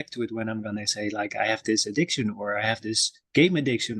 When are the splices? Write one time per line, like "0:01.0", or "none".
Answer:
none